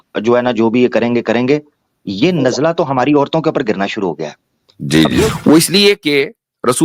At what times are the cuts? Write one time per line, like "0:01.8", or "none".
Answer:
0:05.3